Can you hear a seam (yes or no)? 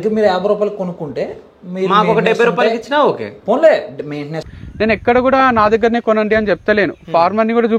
yes